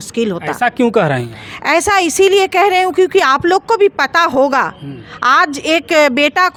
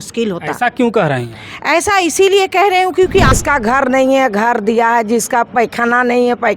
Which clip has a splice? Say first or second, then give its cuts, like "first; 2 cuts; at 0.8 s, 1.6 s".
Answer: second; 1 cut; at 3.3 s